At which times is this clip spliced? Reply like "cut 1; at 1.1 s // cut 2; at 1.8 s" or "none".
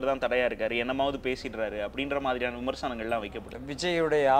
cut 1; at 3.5 s